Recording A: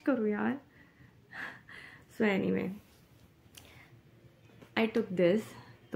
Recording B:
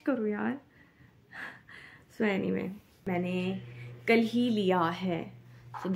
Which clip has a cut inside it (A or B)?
B